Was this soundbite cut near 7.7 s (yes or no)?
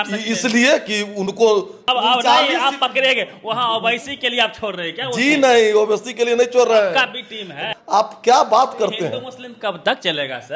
yes